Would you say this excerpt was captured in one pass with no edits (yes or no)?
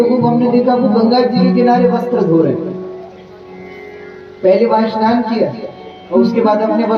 yes